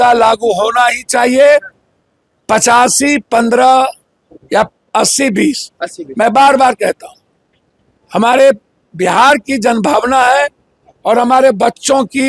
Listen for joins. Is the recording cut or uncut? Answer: uncut